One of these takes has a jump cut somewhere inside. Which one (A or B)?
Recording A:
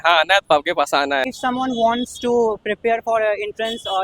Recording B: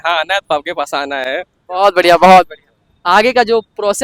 A